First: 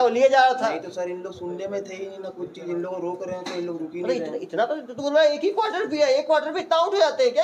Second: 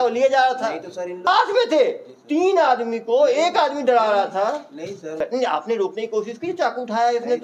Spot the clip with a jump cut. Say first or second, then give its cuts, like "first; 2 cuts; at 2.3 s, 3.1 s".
second; 2 cuts; at 1.3 s, 5.1 s